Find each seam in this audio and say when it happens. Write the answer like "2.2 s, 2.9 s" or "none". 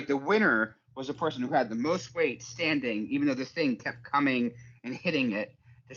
none